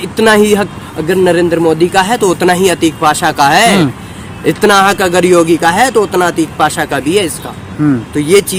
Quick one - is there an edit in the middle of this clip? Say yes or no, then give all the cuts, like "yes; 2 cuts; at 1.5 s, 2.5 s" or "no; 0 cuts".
no; 0 cuts